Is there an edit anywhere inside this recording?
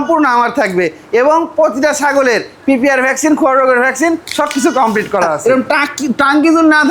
yes; 1 cut; at 5.3 s

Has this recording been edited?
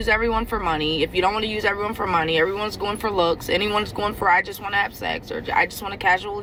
no; 0 cuts

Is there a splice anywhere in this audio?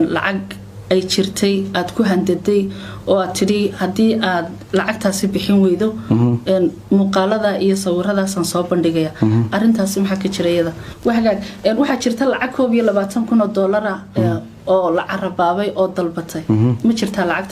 yes; 1 cut; at 10.8 s

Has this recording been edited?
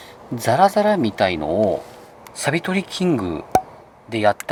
no; 0 cuts

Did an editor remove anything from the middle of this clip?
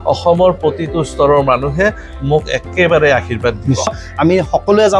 yes; 1 cut; at 3.9 s

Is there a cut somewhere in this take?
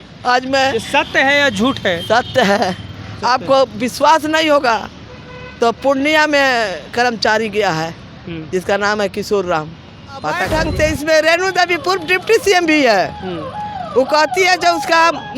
yes; 1 cut; at 10.4 s

